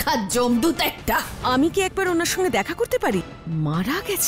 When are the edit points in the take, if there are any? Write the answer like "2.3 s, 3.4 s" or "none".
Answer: 1.4 s, 3.4 s